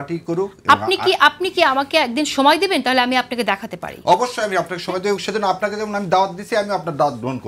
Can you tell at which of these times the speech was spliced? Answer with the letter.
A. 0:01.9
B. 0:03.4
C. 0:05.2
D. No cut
D